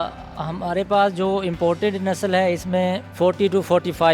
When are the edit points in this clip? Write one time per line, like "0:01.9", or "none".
0:03.1